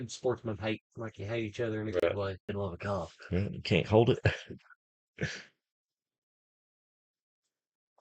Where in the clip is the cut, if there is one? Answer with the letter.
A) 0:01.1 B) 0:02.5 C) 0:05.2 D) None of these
B